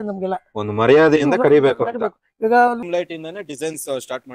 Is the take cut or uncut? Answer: cut